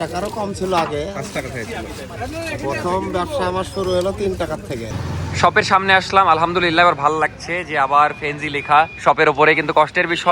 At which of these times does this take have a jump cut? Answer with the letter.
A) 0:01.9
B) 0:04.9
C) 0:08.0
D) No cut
B